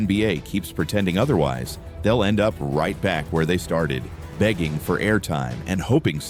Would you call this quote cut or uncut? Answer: uncut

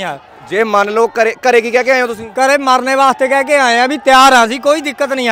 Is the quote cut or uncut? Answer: uncut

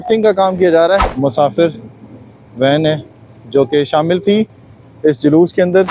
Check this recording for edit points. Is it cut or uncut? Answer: cut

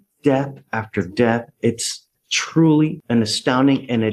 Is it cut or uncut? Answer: uncut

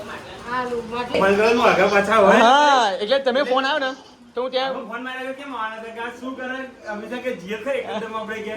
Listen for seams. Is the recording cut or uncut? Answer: uncut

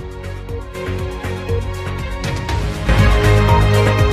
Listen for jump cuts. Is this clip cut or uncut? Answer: cut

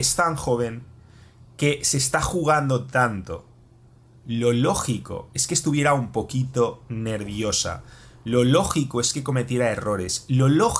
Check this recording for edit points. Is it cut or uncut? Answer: uncut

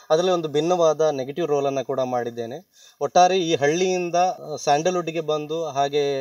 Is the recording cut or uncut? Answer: cut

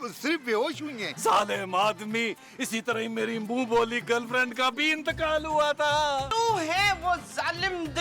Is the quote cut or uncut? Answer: cut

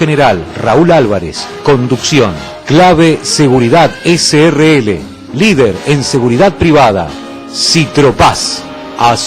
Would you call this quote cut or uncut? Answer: uncut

